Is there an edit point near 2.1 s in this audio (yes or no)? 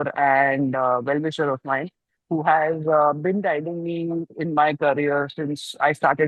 no